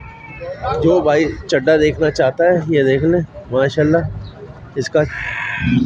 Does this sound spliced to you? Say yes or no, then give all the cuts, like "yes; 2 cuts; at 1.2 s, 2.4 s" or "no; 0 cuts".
no; 0 cuts